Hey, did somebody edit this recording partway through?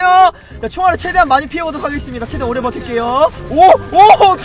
no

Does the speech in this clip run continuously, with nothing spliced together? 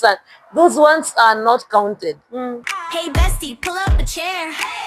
no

